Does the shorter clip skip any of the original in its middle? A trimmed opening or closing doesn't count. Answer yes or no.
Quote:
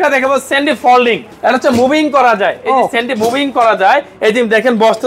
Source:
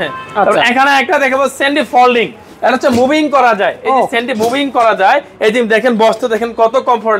yes